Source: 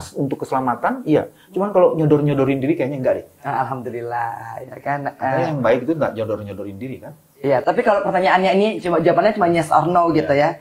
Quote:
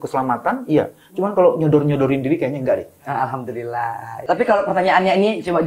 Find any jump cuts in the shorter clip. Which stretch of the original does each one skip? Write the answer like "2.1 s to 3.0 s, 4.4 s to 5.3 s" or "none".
4.6 s to 7.6 s